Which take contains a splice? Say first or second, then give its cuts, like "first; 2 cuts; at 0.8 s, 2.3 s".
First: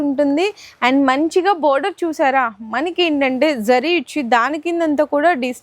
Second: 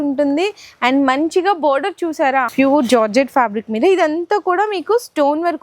second; 1 cut; at 2.5 s